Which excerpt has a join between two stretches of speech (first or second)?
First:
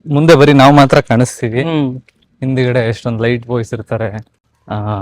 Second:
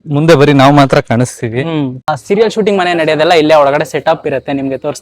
second